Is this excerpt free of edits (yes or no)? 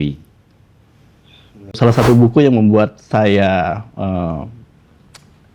no